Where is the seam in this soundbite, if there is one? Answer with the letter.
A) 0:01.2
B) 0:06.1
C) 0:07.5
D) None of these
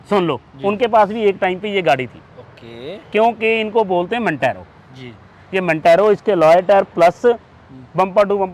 D